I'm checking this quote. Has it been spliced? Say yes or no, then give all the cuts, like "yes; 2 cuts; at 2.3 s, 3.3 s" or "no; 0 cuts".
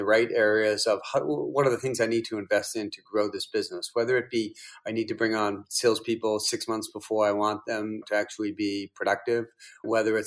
yes; 1 cut; at 8.0 s